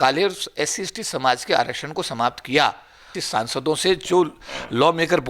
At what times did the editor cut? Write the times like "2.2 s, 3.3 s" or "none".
3.2 s